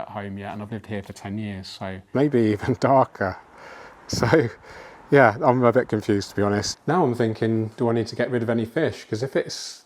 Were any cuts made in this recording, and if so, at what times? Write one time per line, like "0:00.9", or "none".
0:02.0
0:06.7